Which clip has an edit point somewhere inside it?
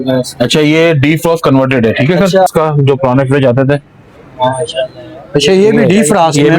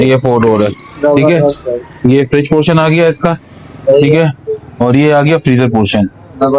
first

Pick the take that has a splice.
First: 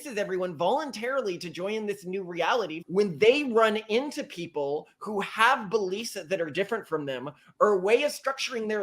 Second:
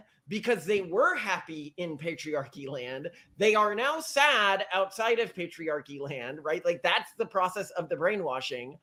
first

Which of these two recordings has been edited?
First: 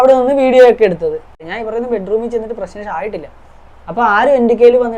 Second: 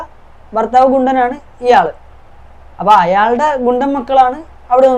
first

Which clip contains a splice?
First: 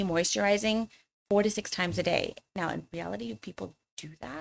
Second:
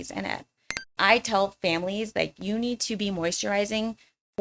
second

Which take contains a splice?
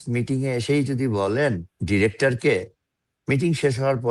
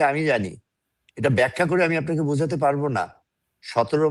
first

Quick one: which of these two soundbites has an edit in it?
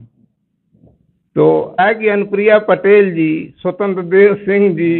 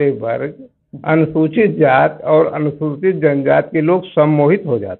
first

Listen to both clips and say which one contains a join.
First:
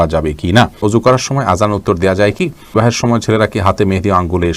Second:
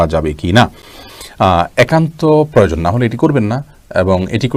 first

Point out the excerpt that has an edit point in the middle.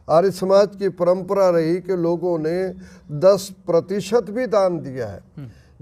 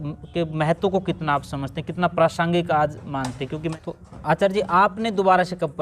second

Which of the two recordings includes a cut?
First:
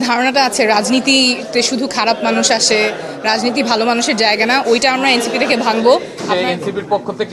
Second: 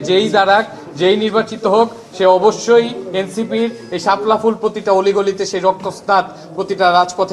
first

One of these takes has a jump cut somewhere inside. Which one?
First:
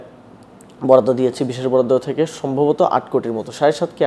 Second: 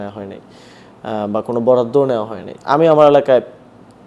second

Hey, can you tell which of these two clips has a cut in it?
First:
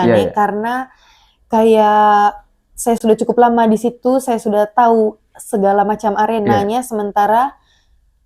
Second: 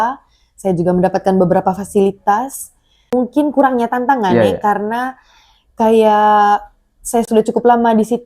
second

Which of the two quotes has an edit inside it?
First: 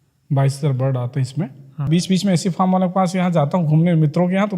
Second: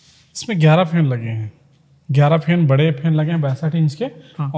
first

